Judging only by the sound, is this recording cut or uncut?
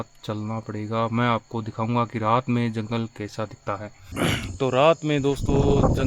cut